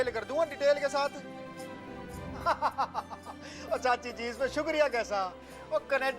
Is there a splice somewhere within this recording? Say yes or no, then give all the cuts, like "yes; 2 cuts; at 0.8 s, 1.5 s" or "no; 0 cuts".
no; 0 cuts